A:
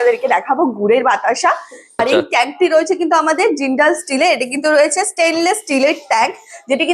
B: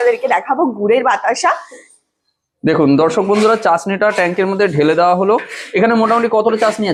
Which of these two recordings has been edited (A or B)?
A